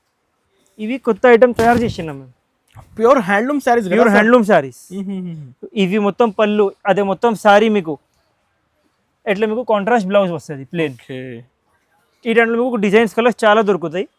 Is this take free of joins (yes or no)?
yes